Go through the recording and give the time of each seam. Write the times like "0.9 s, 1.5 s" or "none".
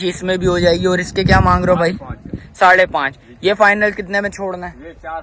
none